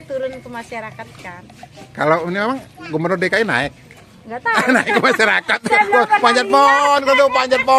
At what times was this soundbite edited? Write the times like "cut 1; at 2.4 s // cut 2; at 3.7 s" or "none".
none